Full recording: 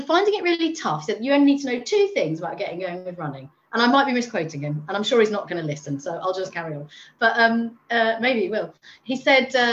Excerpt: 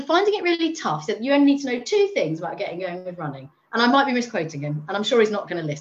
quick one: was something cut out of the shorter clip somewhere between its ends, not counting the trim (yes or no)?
no